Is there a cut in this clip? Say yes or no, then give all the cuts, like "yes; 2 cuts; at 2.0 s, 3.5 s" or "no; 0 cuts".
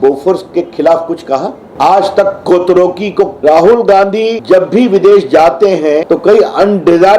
yes; 4 cuts; at 1.6 s, 3.4 s, 4.4 s, 6.0 s